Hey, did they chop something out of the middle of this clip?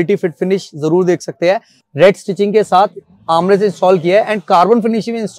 yes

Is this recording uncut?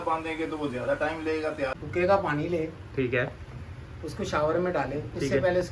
no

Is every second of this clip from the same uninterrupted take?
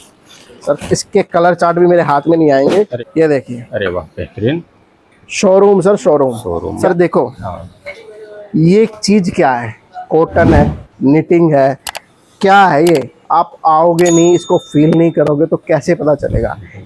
no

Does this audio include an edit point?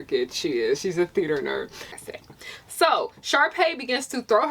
yes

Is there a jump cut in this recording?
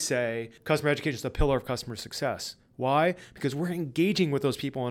no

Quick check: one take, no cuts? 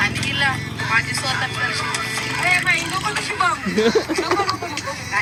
yes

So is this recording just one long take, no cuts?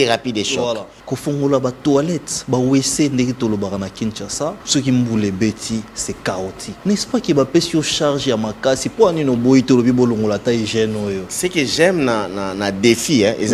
no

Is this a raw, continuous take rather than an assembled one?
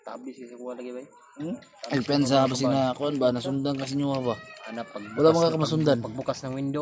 yes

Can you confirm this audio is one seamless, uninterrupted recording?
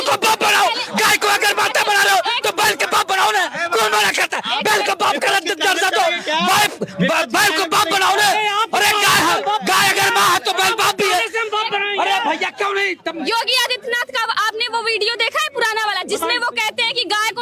yes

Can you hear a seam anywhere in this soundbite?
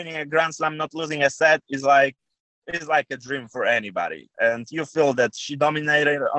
no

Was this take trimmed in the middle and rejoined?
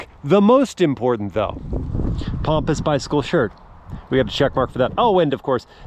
no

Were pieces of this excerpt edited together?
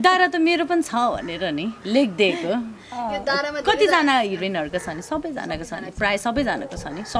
no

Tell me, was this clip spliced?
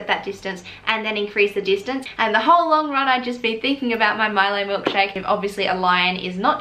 yes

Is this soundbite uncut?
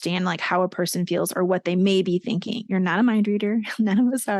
yes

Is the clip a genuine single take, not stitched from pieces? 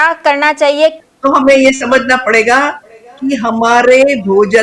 no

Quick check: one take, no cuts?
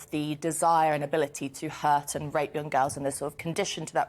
yes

